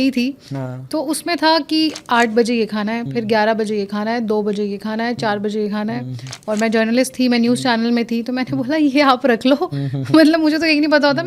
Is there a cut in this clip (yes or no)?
no